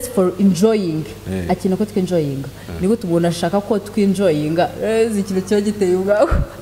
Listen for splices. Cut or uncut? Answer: uncut